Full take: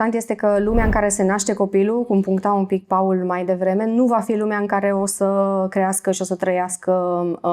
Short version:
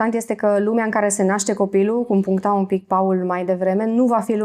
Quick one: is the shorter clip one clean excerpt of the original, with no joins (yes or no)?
yes